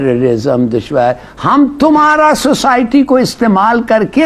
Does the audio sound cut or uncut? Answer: uncut